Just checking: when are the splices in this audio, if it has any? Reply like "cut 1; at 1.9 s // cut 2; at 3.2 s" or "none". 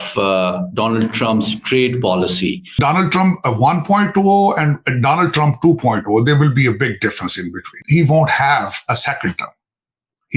cut 1; at 2.7 s // cut 2; at 7.8 s